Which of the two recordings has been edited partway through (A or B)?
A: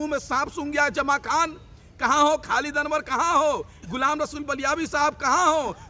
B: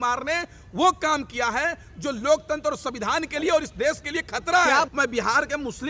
B